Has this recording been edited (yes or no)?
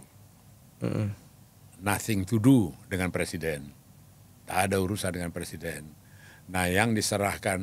no